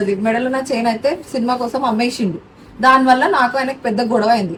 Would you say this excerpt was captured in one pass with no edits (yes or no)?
yes